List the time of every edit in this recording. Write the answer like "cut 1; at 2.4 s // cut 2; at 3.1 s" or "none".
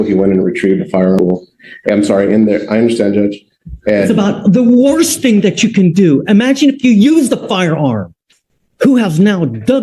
cut 1; at 1.2 s

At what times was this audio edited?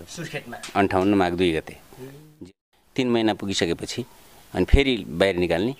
cut 1; at 2.5 s

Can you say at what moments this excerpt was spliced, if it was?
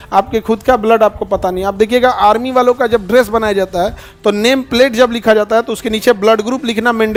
none

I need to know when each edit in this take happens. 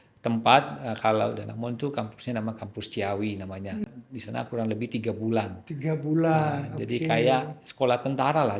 cut 1; at 3.8 s

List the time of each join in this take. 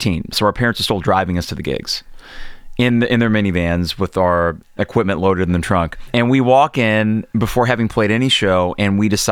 cut 1; at 6.0 s

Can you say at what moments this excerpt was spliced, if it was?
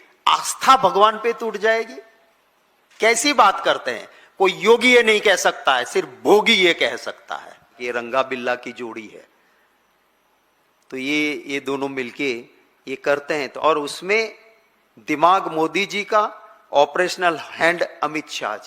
cut 1; at 7.7 s // cut 2; at 13.5 s

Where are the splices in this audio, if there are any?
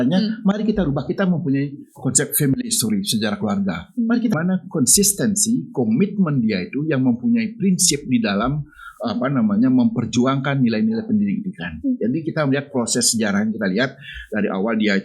cut 1; at 4.3 s

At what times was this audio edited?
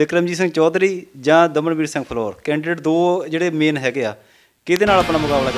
none

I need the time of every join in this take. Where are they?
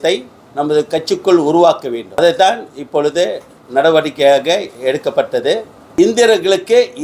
cut 1; at 2.2 s // cut 2; at 5.8 s

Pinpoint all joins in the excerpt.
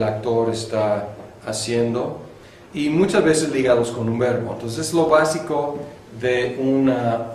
cut 1; at 2.3 s

